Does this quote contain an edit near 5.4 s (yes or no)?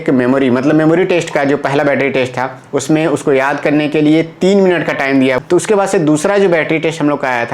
yes